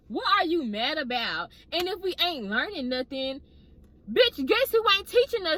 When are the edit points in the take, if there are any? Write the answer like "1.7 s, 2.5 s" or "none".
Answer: none